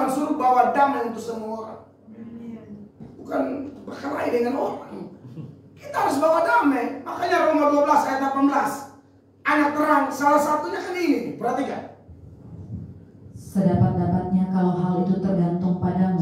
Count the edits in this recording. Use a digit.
1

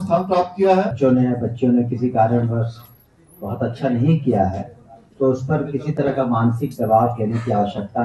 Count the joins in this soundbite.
1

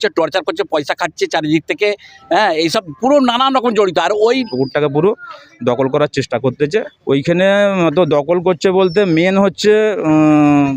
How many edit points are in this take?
2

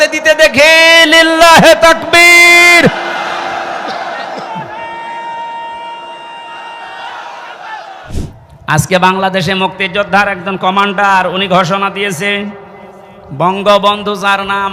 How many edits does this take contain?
1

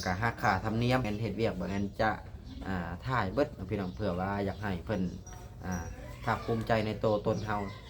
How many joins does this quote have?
1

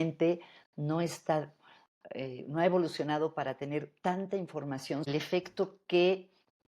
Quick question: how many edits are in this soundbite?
1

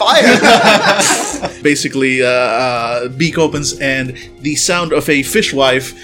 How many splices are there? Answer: 1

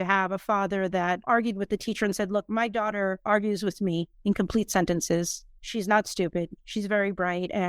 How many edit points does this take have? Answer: 1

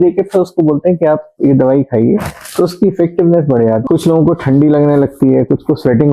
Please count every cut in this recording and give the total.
1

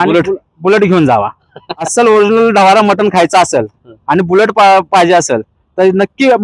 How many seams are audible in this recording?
1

